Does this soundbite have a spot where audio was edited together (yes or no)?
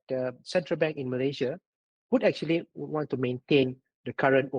no